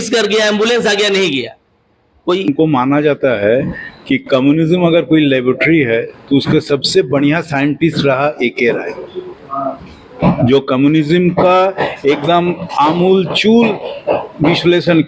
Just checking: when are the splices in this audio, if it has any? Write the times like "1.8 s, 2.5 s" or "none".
2.5 s